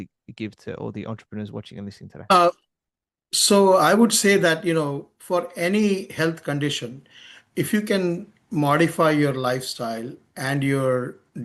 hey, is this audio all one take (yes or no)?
yes